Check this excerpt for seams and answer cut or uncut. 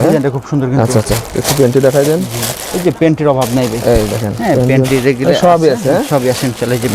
uncut